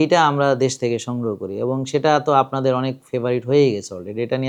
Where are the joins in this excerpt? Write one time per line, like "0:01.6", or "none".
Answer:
none